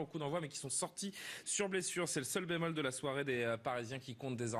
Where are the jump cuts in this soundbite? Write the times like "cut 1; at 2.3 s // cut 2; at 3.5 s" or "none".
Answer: none